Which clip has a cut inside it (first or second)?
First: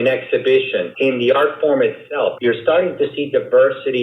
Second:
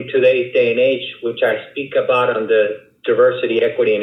first